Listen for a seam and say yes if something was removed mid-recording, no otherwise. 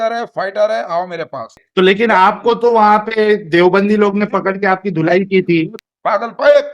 yes